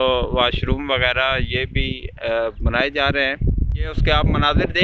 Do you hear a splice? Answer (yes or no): yes